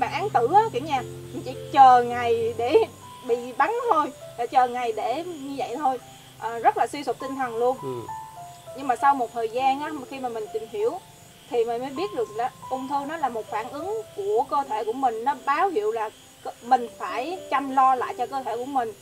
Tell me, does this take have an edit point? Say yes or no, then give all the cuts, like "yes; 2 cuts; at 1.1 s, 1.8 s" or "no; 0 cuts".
no; 0 cuts